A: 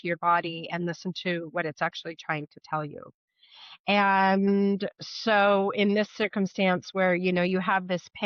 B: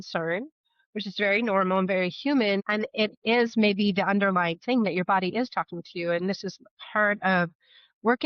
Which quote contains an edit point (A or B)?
B